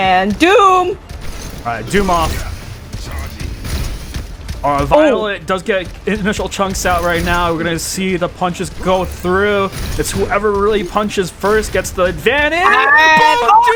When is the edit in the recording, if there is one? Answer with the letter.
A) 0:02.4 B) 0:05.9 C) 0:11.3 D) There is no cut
D